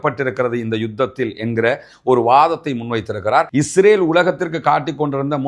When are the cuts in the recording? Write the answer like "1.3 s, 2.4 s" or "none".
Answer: 3.5 s

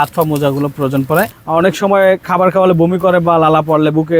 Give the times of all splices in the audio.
1.4 s

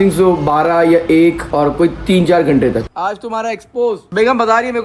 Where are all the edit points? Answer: 2.9 s

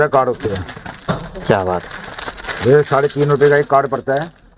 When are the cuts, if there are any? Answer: none

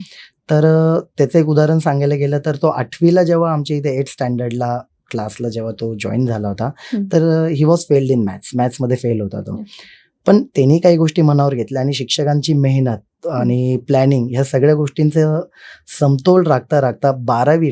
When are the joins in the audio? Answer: none

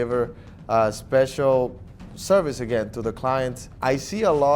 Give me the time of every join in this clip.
3.6 s

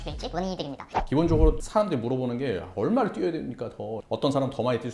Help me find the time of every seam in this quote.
0.9 s, 4.0 s

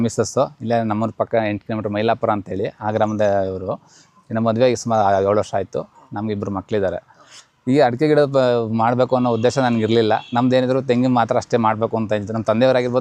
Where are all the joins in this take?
none

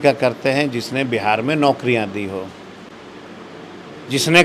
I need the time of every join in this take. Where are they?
none

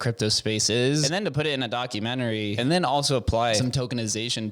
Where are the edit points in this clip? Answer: 1.1 s, 2.5 s, 3.6 s

